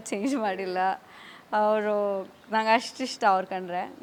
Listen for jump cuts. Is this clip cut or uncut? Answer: uncut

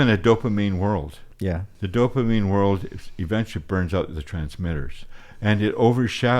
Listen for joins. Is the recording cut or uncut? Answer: cut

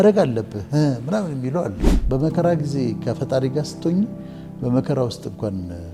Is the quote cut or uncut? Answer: cut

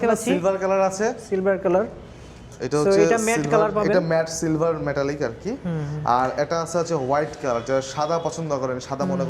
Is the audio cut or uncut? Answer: uncut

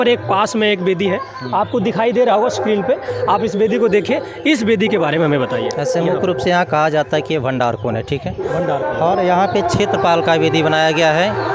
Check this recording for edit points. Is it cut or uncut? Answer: uncut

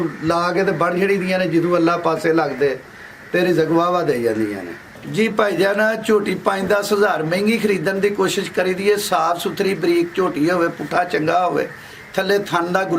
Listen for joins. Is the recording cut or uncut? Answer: cut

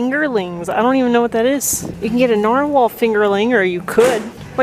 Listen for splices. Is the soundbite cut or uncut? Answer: uncut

